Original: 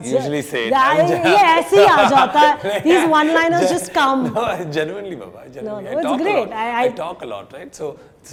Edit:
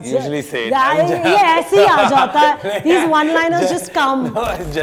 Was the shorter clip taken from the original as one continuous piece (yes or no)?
yes